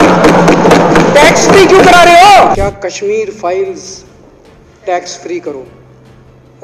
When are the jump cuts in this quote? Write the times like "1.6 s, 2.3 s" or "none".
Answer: 2.6 s